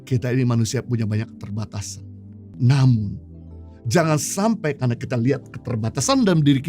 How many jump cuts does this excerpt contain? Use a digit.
1